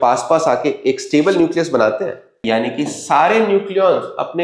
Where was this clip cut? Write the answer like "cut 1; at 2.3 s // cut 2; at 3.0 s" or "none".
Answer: cut 1; at 2.4 s